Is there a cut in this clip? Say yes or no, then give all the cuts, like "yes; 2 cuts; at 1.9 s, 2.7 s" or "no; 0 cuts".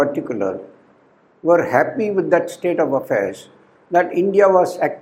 no; 0 cuts